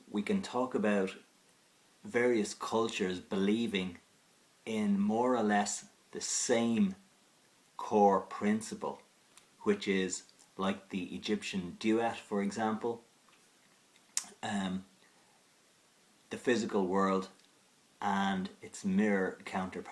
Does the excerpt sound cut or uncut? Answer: uncut